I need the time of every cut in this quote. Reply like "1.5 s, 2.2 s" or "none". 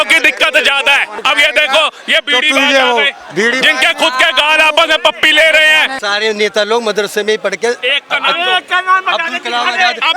1.1 s, 6.0 s